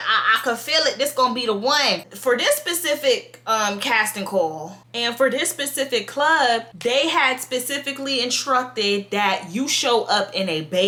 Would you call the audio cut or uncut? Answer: uncut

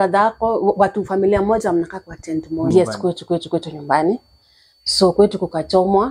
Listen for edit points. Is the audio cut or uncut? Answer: cut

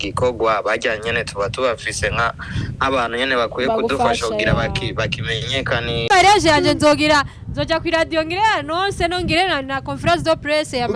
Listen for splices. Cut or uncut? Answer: cut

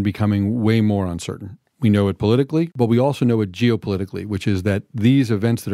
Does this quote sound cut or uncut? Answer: cut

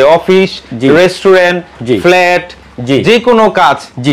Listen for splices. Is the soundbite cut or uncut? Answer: uncut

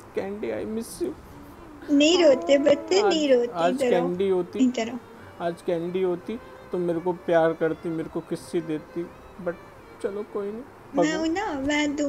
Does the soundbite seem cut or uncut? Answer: uncut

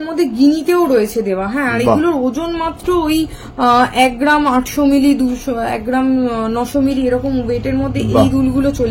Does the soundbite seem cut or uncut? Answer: uncut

